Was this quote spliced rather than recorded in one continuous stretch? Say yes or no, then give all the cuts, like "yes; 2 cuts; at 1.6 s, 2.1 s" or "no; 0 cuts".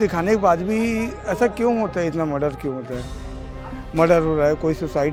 no; 0 cuts